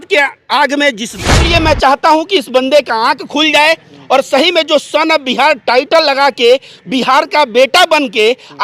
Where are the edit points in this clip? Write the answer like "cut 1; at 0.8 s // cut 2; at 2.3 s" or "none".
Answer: cut 1; at 1.3 s